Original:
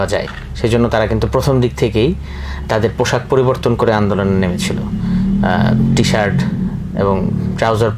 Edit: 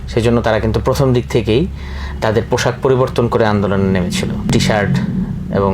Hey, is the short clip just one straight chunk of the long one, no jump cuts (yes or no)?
no